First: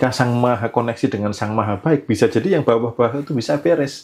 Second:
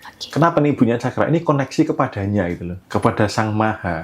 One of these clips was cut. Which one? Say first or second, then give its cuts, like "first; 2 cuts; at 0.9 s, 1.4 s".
second; 1 cut; at 2.7 s